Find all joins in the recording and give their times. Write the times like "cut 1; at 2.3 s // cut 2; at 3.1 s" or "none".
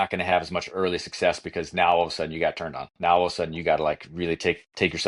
none

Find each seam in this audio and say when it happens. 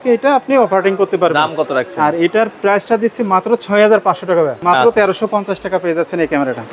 cut 1; at 4.6 s

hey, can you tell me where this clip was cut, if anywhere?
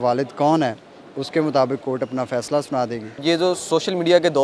cut 1; at 3.1 s

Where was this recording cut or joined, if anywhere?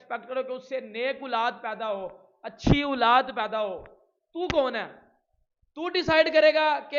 none

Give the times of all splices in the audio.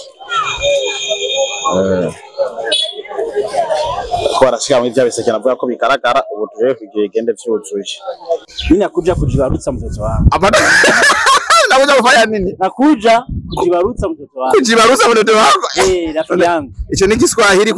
cut 1; at 8.5 s

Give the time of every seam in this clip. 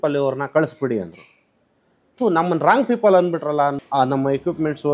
cut 1; at 3.8 s

